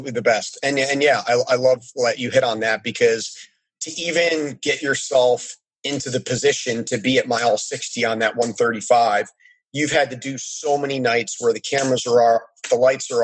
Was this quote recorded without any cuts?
yes; 0 cuts

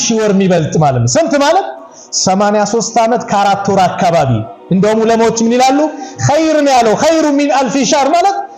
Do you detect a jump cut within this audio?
no; 0 cuts

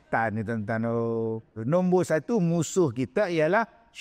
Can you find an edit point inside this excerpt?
yes; 1 cut; at 1.5 s

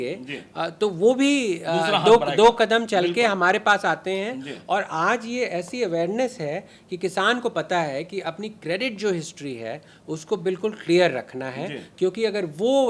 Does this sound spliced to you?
no; 0 cuts

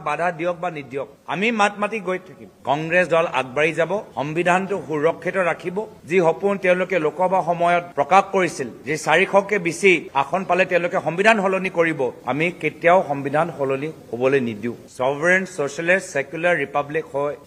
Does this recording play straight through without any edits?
no; 3 cuts; at 1.1 s, 2.5 s, 6.0 s

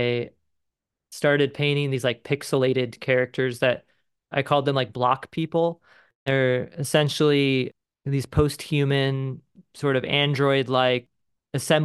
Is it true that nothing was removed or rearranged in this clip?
yes; 0 cuts

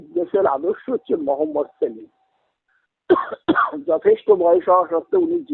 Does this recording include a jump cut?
no; 0 cuts

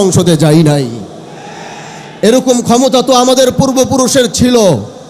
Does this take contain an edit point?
no; 0 cuts

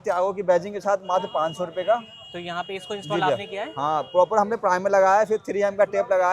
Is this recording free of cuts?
yes; 0 cuts

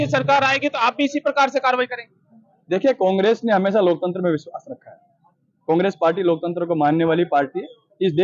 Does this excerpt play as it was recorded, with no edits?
yes; 0 cuts

